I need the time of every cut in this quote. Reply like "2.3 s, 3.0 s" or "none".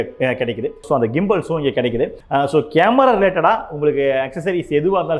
0.9 s, 2.2 s